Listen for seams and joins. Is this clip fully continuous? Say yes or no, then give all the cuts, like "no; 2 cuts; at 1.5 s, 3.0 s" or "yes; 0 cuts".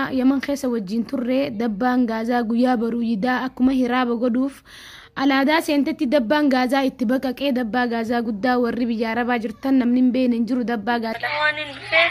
no; 1 cut; at 11.1 s